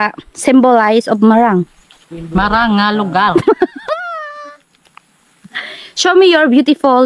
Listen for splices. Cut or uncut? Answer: uncut